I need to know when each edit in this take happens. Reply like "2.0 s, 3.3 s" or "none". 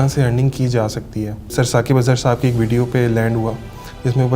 1.5 s